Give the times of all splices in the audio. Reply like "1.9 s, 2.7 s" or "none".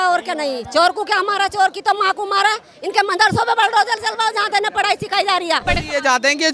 5.6 s